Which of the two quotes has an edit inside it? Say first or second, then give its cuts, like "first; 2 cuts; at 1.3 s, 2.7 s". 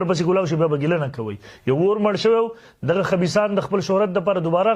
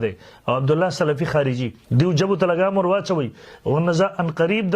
second; 1 cut; at 1.7 s